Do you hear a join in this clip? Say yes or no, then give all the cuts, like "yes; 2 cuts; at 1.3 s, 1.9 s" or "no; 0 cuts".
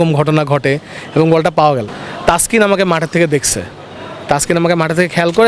yes; 1 cut; at 1.9 s